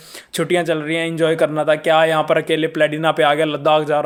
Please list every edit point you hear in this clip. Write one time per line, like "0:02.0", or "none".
none